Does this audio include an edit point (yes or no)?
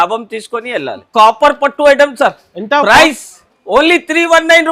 yes